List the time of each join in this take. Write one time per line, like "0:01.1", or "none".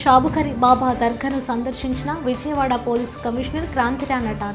none